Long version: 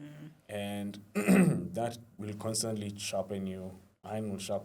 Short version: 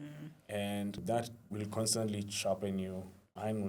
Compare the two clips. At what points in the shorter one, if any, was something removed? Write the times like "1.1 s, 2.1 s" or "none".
1.0 s